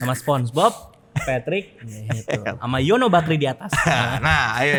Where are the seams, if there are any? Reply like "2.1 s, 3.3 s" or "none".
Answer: none